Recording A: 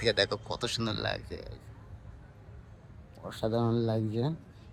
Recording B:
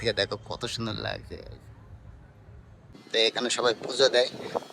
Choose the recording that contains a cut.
B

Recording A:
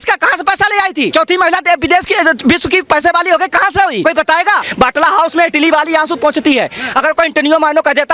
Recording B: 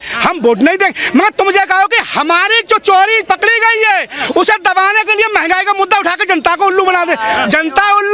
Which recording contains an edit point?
A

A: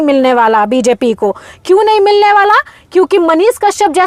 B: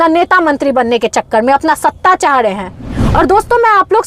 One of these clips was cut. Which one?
B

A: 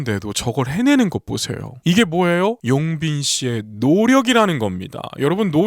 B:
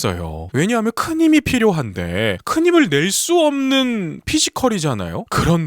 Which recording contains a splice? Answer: B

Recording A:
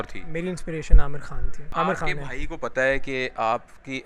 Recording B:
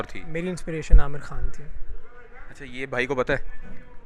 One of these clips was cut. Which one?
A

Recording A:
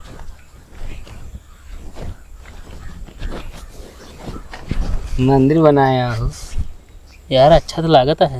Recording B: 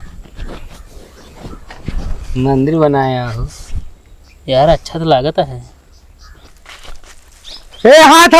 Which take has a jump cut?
B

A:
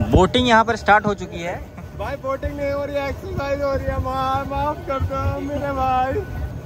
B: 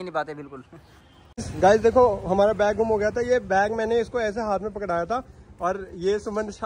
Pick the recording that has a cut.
B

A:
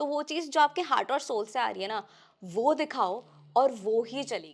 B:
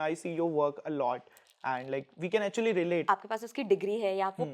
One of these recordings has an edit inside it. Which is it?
B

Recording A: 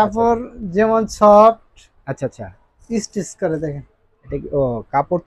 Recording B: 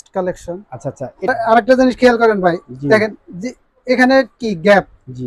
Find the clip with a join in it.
B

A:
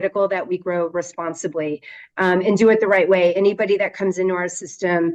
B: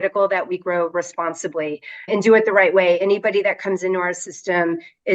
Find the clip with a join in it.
B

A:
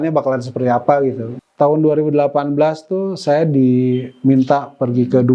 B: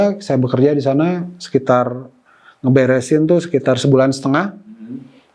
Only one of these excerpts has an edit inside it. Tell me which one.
A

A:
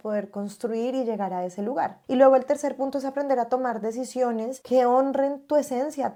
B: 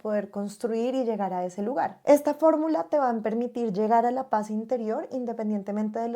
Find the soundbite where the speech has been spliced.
B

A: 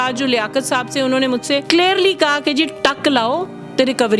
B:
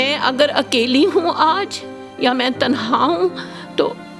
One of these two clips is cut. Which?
A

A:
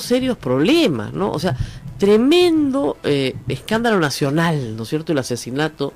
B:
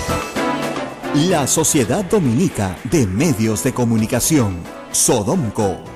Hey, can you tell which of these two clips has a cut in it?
B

